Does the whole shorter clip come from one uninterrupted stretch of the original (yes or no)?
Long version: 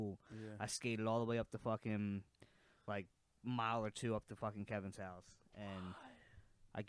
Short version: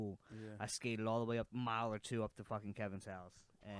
no